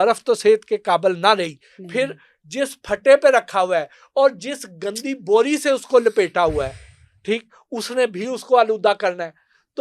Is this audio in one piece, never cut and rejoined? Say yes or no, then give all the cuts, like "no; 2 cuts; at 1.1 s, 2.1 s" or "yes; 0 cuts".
yes; 0 cuts